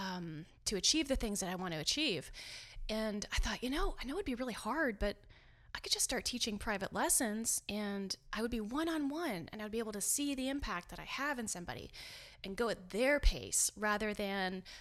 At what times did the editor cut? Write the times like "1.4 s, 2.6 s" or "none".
none